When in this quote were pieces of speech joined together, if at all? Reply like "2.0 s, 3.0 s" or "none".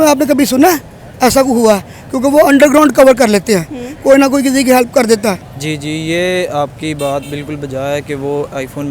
5.5 s